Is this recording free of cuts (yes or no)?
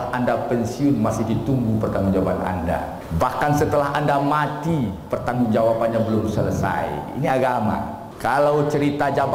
no